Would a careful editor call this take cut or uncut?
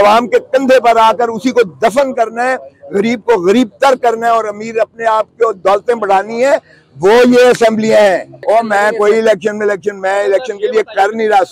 cut